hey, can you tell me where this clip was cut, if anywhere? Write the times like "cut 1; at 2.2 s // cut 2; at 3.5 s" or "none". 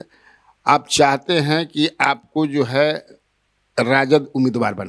none